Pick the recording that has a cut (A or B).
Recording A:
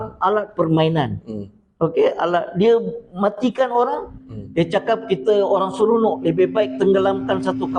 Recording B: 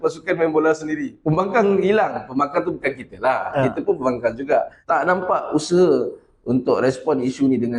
B